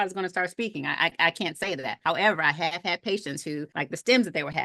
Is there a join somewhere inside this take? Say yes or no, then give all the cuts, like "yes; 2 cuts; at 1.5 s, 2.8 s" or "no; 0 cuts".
yes; 2 cuts; at 1.9 s, 3.7 s